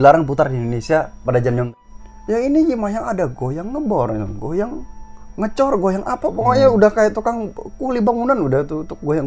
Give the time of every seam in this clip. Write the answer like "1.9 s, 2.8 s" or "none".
1.7 s